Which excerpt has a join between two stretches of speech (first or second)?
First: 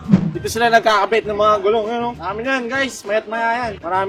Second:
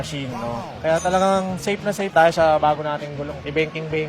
second